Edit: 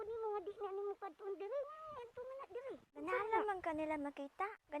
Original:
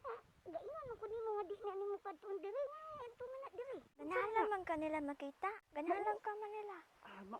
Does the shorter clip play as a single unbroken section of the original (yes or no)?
yes